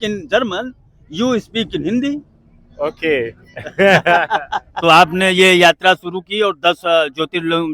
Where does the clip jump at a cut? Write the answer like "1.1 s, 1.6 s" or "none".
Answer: 4.6 s